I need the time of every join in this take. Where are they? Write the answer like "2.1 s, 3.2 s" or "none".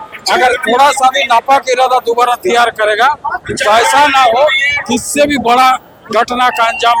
none